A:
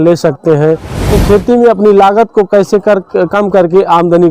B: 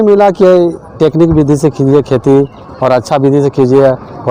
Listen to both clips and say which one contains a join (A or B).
A